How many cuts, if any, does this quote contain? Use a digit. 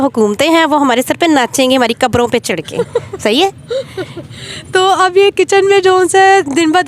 0